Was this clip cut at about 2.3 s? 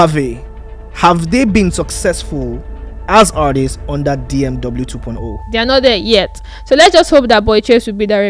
no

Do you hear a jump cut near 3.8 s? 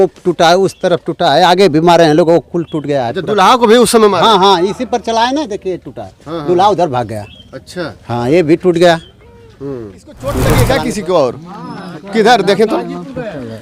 no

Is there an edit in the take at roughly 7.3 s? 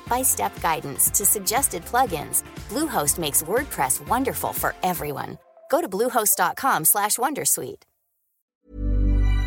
no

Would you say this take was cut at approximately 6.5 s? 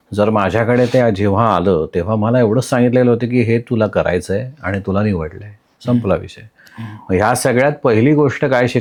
no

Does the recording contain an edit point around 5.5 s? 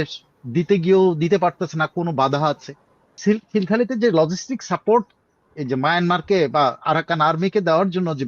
no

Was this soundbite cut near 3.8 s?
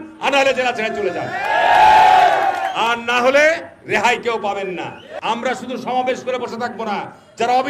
no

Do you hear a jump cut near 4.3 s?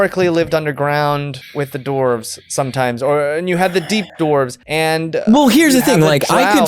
yes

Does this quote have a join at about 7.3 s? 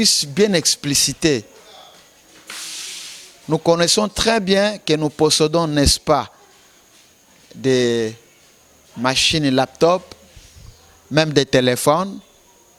no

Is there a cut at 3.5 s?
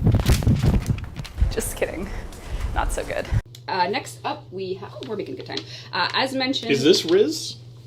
yes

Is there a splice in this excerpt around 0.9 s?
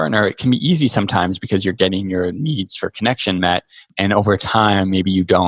no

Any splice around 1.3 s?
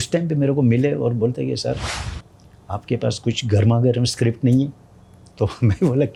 no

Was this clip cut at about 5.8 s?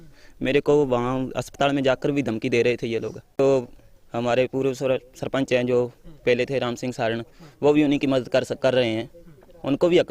no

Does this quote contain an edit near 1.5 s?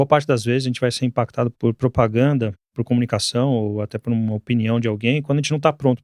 yes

